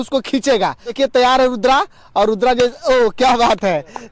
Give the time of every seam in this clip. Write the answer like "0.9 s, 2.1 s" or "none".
0.9 s